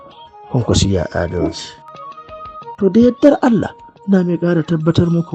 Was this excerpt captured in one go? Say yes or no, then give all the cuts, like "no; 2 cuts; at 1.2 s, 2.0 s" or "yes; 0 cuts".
no; 1 cut; at 2.1 s